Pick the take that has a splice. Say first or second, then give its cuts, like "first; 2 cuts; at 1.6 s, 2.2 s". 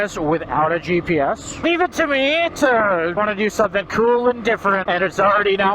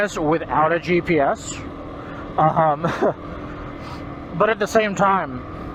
first; 3 cuts; at 1.6 s, 3.2 s, 4.8 s